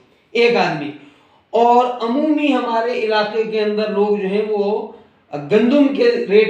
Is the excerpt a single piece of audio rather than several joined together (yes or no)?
yes